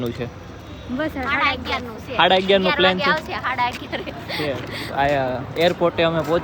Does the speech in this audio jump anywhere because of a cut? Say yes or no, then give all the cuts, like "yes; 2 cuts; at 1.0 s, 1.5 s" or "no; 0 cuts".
no; 0 cuts